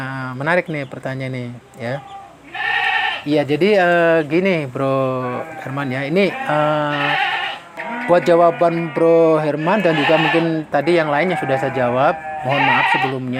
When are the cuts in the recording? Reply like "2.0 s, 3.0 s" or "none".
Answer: none